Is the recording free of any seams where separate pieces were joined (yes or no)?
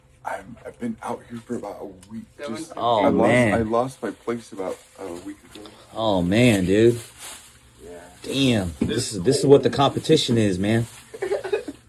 yes